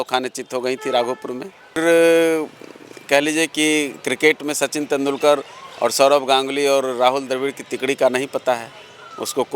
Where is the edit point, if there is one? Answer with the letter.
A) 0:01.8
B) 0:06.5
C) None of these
A